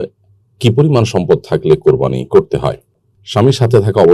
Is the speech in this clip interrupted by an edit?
yes; 1 cut; at 2.8 s

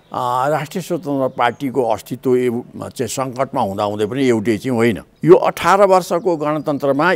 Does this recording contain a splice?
yes; 1 cut; at 5.1 s

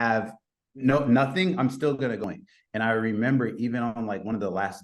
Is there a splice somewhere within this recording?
yes; 1 cut; at 2.2 s

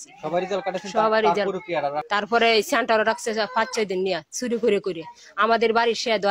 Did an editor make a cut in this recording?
yes; 1 cut; at 2.0 s

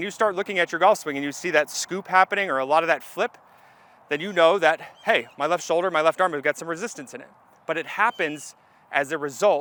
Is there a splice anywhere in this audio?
no; 0 cuts

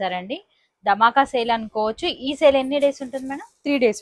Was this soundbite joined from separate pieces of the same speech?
no; 0 cuts

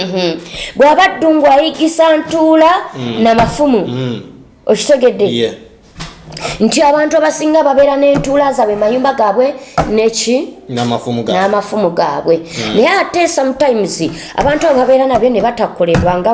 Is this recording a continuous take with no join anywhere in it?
yes; 0 cuts

